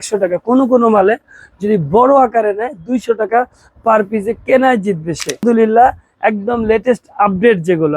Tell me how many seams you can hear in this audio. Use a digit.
1